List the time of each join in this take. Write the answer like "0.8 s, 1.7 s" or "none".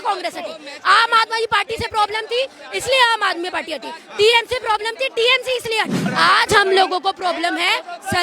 6.0 s